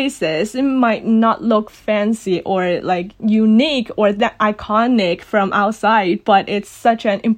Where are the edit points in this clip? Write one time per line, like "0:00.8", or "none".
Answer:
none